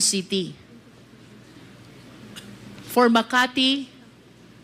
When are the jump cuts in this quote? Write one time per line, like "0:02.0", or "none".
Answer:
none